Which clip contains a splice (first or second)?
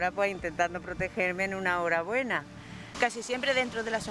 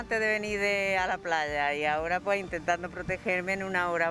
first